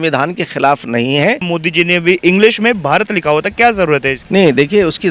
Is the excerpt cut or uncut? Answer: cut